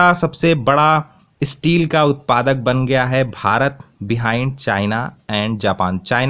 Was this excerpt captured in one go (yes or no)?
yes